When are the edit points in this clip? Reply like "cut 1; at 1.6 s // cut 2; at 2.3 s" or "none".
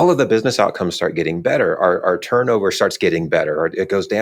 none